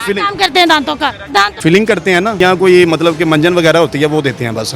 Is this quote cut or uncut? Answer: cut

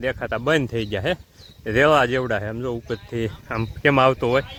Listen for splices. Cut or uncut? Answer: uncut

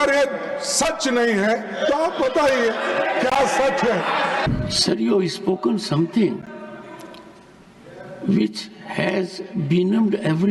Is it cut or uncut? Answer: cut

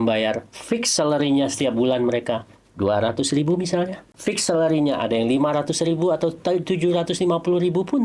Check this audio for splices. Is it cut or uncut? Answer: cut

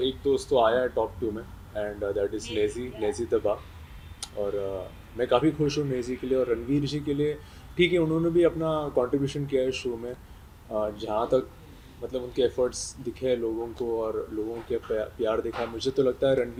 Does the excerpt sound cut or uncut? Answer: uncut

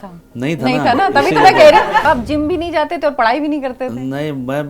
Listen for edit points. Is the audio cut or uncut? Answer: cut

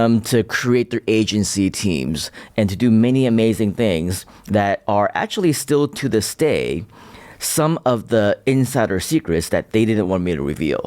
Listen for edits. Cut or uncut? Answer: uncut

